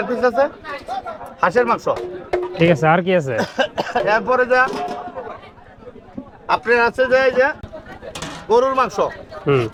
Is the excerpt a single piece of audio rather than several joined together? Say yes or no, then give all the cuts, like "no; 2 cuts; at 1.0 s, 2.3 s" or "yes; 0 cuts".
yes; 0 cuts